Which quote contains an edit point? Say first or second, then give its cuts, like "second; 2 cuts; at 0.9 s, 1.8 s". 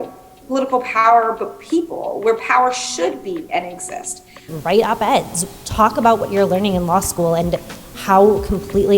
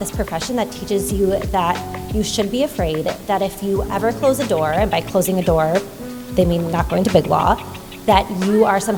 first; 1 cut; at 4.4 s